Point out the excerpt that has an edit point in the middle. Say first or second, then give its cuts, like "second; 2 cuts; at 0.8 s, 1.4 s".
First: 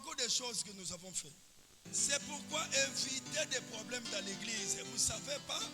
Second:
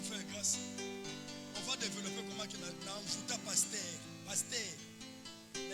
first; 1 cut; at 1.8 s